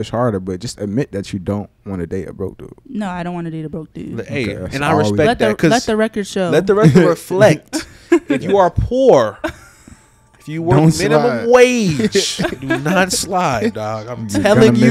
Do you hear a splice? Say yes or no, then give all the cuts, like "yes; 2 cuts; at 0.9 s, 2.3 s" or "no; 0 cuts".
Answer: no; 0 cuts